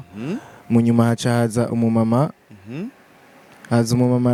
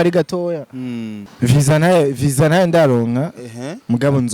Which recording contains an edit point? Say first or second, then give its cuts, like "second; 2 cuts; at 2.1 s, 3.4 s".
second; 1 cut; at 1.2 s